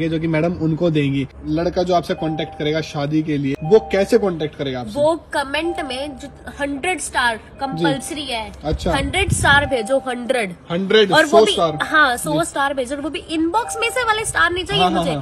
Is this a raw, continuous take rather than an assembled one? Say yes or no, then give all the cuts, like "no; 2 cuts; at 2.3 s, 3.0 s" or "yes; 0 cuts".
no; 2 cuts; at 1.4 s, 3.6 s